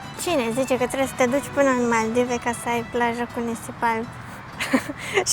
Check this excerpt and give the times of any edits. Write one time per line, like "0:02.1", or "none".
none